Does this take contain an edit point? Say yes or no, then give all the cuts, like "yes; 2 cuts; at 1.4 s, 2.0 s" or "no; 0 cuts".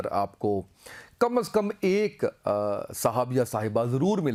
no; 0 cuts